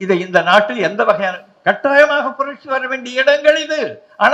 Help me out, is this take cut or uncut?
uncut